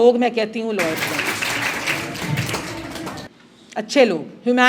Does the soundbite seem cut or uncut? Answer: uncut